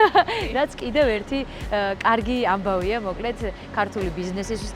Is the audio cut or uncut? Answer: uncut